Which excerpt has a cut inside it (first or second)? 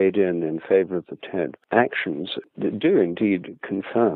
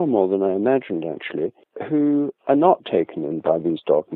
first